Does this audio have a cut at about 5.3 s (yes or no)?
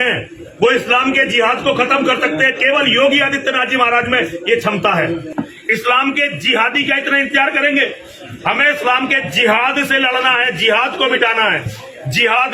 yes